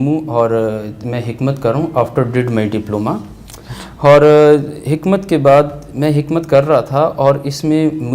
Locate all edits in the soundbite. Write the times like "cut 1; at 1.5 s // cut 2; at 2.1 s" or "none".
none